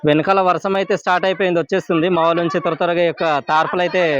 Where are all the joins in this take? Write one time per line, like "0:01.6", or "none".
none